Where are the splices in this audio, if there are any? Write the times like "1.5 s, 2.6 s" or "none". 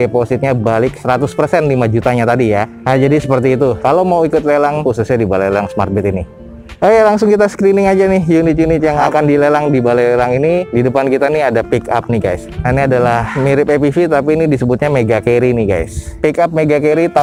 none

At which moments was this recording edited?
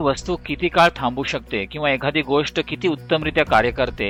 none

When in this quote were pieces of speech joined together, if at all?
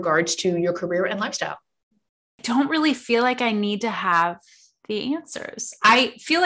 2.4 s

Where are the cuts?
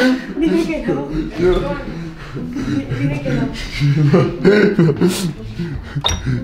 none

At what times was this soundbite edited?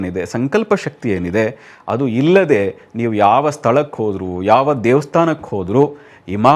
none

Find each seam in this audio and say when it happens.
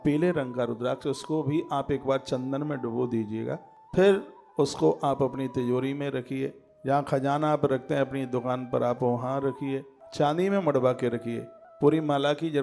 none

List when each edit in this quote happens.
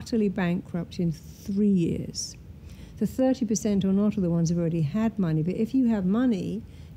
none

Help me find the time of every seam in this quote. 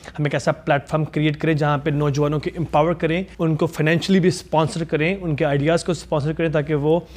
3.3 s

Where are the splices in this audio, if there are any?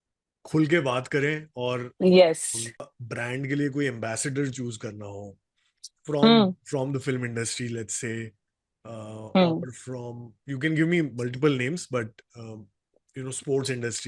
2.8 s

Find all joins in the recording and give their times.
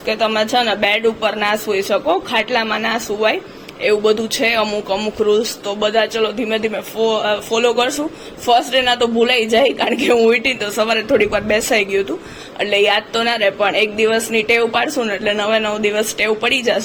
none

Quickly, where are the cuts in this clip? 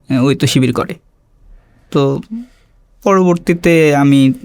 none

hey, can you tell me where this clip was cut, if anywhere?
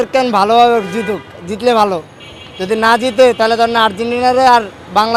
none

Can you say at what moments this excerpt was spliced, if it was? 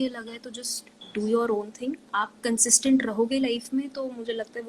none

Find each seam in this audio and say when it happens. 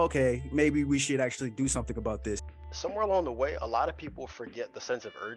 2.4 s

